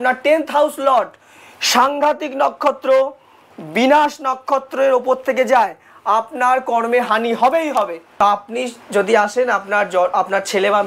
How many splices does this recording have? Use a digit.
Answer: 1